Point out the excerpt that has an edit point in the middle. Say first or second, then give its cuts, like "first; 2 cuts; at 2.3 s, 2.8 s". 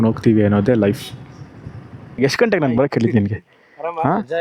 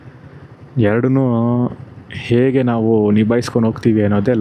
first; 1 cut; at 2.2 s